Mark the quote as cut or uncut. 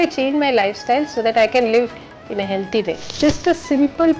cut